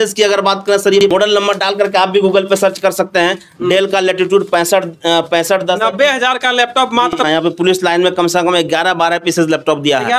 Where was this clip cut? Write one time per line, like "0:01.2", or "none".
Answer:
0:01.1
0:07.2